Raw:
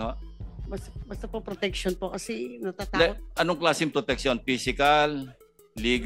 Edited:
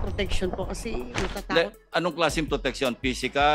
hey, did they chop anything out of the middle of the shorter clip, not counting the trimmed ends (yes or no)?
no